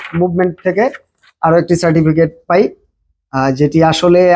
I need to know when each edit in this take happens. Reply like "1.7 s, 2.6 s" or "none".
none